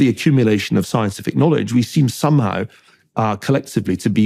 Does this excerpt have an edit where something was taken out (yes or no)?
no